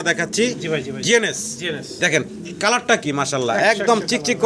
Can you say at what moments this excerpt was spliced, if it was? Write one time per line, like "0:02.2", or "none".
none